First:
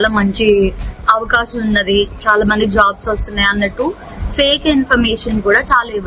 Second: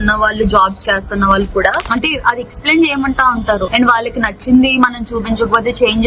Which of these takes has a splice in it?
second; 1 cut; at 1.8 s

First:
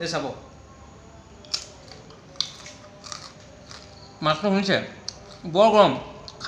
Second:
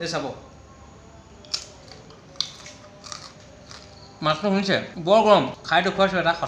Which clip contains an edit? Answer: second; 2 cuts; at 4.9 s, 5.6 s

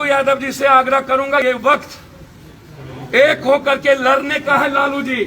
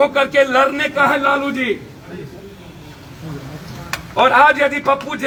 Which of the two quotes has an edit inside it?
first; 1 cut; at 1.4 s

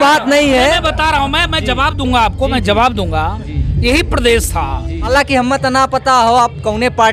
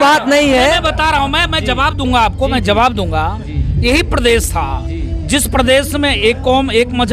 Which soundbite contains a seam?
first; 1 cut; at 5.1 s

